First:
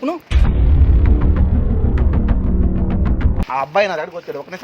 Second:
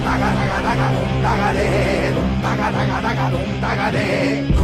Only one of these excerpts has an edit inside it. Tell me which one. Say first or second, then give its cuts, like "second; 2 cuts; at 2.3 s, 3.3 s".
first; 1 cut; at 3.4 s